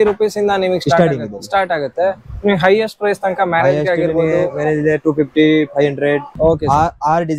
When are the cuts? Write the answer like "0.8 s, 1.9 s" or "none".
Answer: 6.3 s